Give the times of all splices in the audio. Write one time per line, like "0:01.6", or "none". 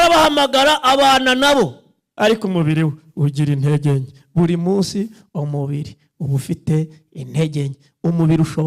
0:02.0